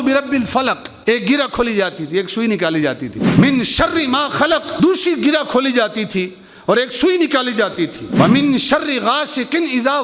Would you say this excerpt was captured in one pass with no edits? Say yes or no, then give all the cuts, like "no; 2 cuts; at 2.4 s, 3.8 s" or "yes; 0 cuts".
yes; 0 cuts